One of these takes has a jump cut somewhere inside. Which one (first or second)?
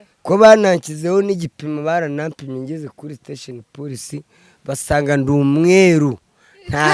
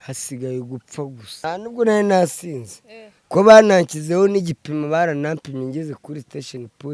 second